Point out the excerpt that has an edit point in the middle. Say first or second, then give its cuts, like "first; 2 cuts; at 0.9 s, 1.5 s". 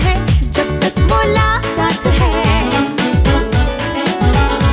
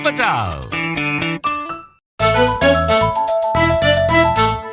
second; 1 cut; at 2.1 s